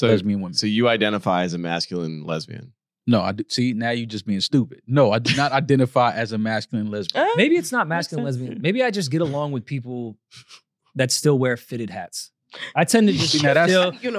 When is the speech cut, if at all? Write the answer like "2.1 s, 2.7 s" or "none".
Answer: none